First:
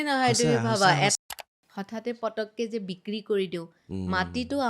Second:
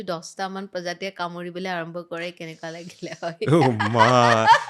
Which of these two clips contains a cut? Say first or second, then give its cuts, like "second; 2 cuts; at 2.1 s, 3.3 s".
first; 1 cut; at 1.1 s